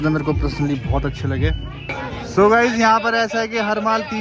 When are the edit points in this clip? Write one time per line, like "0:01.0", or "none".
0:01.7